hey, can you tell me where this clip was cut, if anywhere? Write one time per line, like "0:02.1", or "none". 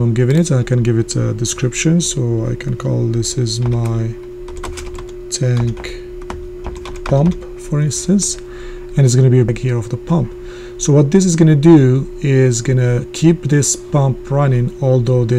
0:09.5